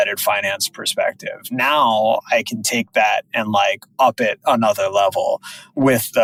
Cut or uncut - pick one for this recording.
uncut